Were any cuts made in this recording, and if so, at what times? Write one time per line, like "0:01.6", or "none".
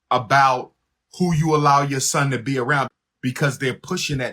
0:02.9